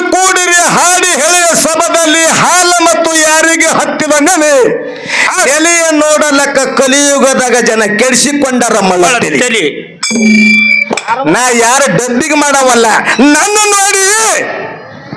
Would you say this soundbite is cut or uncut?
uncut